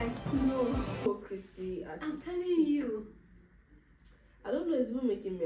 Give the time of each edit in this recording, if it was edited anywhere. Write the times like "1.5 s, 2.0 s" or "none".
1.1 s